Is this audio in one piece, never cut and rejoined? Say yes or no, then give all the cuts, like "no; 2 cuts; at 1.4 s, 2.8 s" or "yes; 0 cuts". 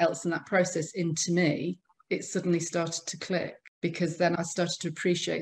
no; 1 cut; at 3.6 s